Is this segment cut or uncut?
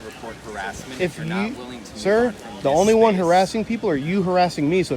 uncut